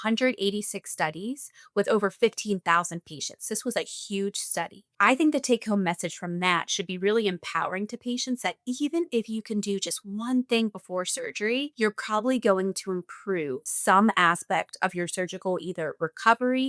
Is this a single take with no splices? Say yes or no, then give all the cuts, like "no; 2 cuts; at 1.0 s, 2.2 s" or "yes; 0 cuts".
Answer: no; 3 cuts; at 4.8 s, 11.7 s, 13.7 s